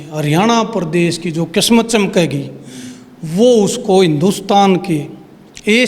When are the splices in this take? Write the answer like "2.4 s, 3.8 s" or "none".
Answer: none